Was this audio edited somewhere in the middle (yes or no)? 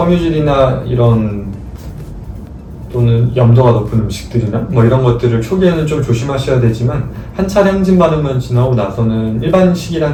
no